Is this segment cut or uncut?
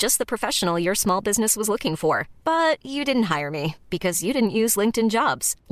uncut